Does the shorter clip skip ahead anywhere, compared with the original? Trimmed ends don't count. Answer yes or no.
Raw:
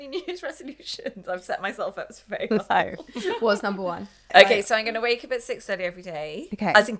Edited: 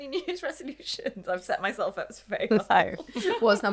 no